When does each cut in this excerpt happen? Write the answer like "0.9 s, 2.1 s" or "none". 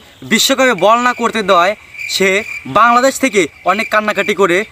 none